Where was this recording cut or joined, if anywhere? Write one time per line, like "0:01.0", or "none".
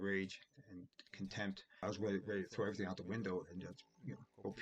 0:01.8